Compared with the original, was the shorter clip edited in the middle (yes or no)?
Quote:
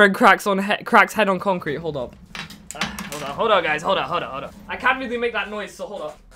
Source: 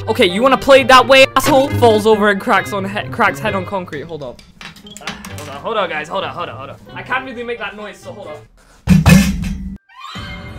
no